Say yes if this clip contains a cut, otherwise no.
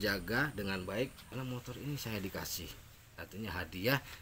yes